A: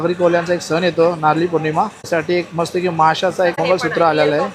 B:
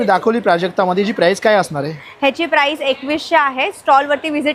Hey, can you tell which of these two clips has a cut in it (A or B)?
A